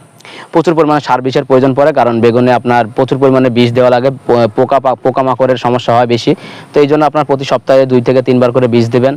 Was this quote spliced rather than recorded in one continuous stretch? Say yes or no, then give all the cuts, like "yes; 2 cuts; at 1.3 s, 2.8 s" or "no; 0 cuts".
no; 0 cuts